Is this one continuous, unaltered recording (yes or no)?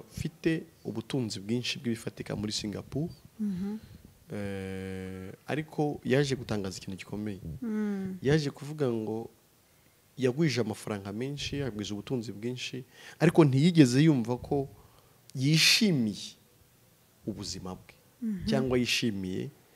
yes